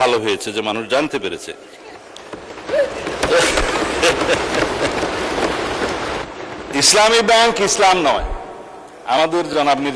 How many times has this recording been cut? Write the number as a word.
one